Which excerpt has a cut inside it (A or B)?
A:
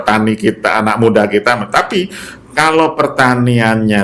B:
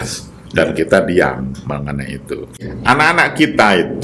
B